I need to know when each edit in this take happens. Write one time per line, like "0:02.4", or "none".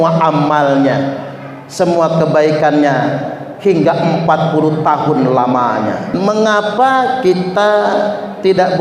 0:06.1